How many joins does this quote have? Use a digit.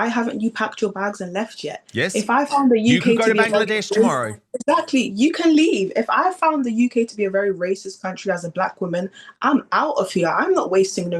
0